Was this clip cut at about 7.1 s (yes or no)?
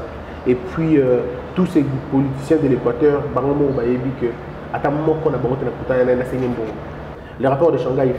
yes